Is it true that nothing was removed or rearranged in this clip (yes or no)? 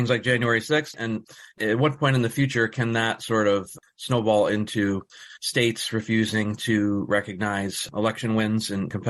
yes